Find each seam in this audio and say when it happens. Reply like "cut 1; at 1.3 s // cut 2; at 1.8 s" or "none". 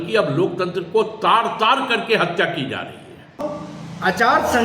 cut 1; at 3.4 s